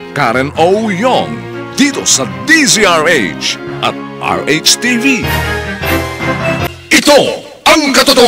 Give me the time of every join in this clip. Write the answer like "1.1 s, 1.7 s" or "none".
6.7 s